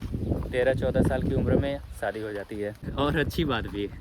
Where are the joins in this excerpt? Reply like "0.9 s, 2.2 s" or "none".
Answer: 2.8 s

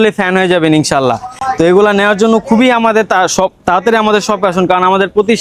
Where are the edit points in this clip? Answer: none

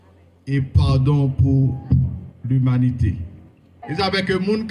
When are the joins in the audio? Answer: 3.8 s

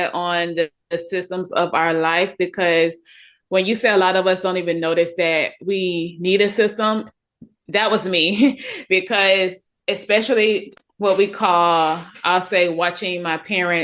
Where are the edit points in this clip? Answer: 10.7 s

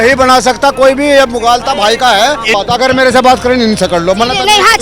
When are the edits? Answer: 2.5 s

